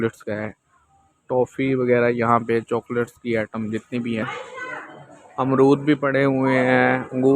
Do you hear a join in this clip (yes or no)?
yes